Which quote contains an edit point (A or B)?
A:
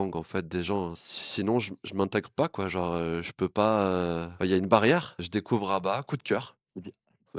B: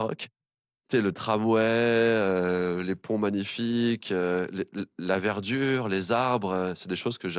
A